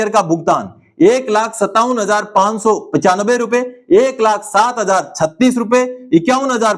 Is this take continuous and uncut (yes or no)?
yes